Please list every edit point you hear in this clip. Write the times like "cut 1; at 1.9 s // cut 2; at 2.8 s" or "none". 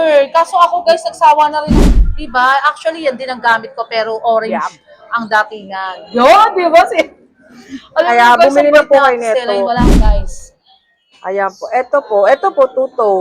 cut 1; at 1.7 s // cut 2; at 10.2 s